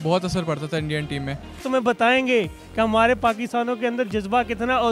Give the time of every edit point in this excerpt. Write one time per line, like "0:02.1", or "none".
0:01.6